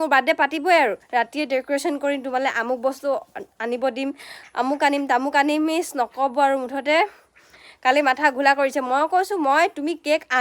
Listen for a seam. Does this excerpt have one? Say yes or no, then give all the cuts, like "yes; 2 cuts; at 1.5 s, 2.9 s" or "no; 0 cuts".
no; 0 cuts